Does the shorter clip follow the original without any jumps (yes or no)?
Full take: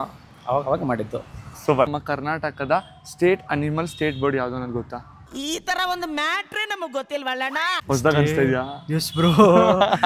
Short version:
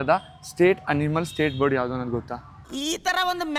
yes